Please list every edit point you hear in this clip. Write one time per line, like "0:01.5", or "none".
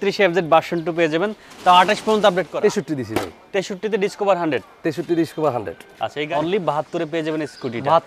0:02.5
0:06.0